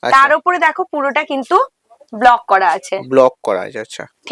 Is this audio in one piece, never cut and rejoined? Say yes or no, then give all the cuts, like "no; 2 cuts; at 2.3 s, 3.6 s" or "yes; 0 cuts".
yes; 0 cuts